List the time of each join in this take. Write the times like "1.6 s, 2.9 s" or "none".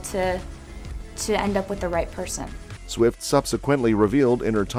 none